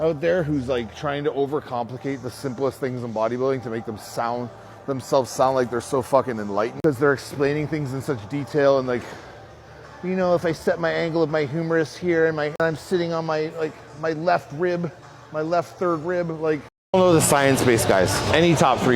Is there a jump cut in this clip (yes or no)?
yes